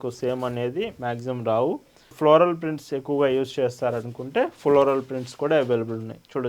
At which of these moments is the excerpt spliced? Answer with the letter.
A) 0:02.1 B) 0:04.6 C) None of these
A